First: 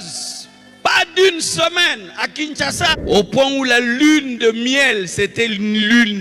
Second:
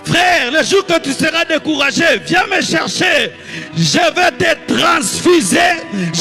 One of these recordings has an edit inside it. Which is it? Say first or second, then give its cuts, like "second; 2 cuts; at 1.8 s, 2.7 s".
first; 1 cut; at 2.9 s